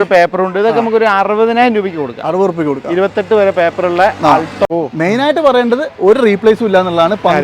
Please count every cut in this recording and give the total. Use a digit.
1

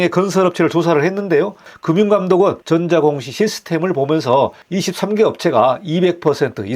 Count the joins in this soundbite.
2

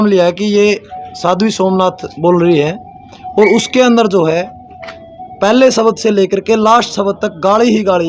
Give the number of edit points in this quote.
0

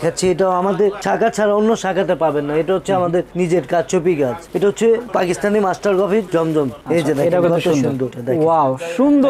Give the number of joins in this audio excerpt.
2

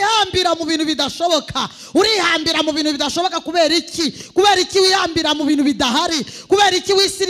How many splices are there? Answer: 0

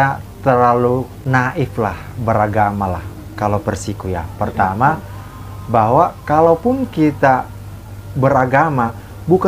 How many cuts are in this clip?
1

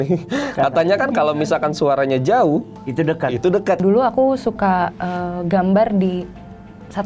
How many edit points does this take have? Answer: 1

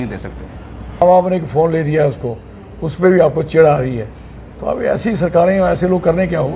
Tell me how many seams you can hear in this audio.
1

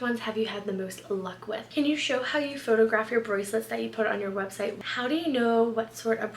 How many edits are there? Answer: 2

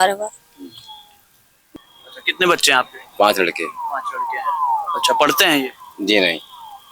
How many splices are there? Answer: 1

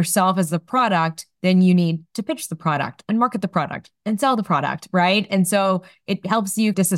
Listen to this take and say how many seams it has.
0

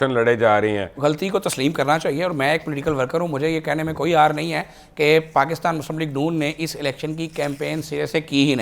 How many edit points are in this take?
1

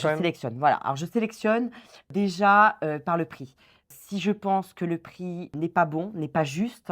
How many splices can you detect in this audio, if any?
3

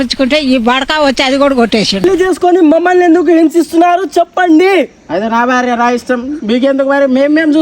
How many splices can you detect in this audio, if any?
1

